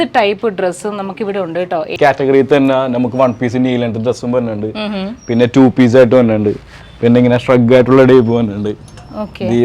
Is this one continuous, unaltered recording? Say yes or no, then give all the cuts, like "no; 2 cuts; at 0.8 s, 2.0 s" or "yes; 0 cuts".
no; 1 cut; at 1.9 s